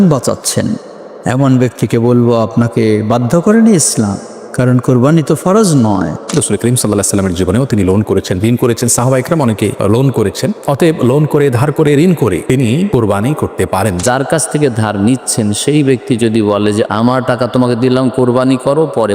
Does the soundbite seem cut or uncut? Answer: cut